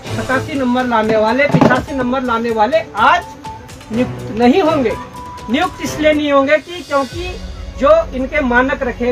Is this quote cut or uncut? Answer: uncut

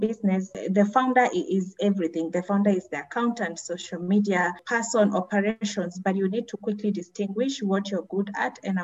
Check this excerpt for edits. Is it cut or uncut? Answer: uncut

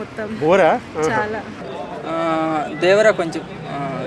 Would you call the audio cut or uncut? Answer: cut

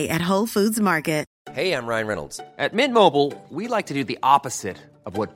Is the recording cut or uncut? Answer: cut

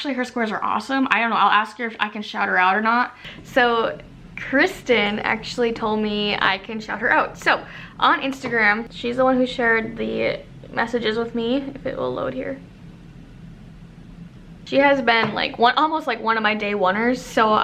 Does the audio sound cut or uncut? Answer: uncut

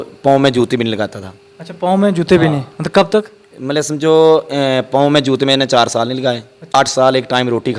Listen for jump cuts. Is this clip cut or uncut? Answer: cut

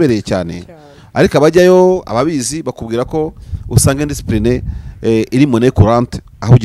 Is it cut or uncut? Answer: uncut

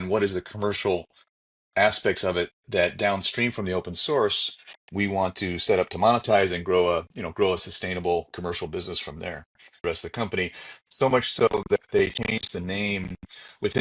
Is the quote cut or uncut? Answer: cut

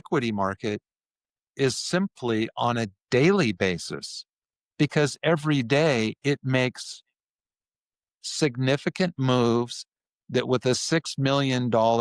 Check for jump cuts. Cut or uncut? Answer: uncut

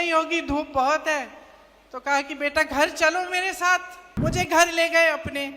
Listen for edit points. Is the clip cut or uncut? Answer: cut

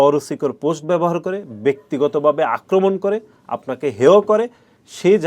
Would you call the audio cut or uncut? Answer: uncut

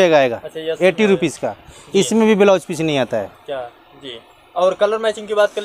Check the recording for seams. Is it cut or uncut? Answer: uncut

